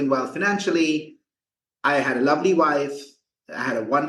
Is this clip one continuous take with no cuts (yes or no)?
yes